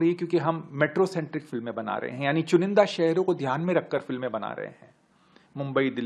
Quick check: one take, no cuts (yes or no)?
yes